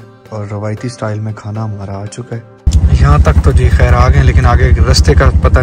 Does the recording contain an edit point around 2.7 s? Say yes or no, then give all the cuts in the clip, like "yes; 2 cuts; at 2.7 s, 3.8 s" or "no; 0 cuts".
yes; 1 cut; at 2.7 s